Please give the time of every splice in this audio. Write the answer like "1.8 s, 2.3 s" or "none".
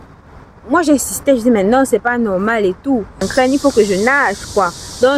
3.2 s